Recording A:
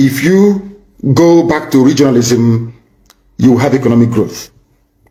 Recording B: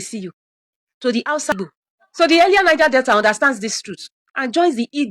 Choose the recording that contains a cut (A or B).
B